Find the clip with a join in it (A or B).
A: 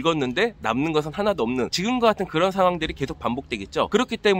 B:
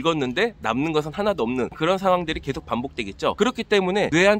B